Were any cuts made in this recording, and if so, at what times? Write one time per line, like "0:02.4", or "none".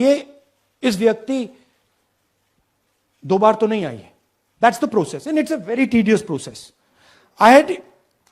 none